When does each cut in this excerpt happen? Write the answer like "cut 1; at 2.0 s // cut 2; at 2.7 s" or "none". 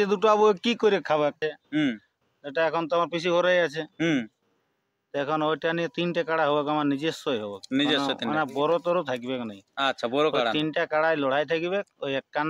cut 1; at 1.5 s